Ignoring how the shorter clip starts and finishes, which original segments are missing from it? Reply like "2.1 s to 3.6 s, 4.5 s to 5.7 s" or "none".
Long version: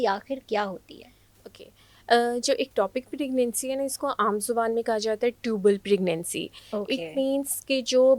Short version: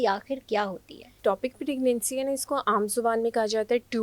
1.2 s to 2.7 s